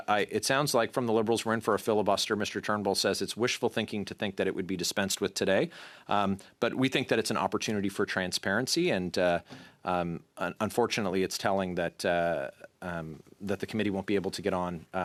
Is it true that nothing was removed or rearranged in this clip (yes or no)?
yes